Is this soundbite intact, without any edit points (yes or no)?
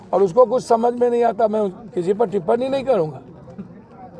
yes